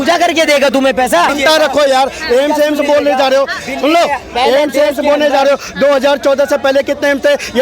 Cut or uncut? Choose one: cut